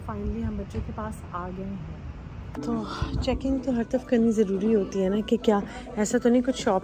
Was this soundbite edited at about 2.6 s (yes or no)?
yes